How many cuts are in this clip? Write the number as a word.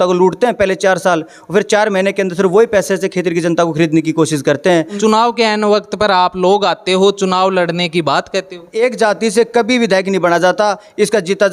two